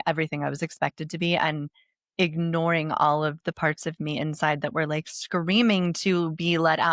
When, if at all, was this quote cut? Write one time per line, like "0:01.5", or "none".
none